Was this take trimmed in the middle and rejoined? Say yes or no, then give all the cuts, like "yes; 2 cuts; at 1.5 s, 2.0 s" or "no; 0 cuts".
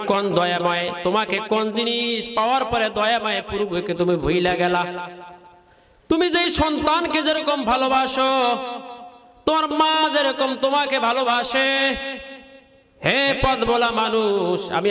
no; 0 cuts